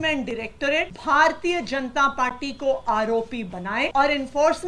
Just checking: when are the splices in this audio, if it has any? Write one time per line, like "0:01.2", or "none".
0:00.9
0:03.9